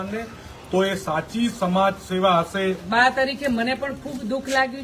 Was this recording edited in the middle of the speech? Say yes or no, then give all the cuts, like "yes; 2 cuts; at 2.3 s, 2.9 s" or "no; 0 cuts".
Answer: yes; 1 cut; at 2.8 s